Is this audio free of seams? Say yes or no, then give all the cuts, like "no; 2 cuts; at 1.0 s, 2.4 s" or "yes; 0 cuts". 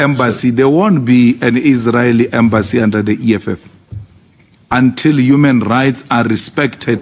yes; 0 cuts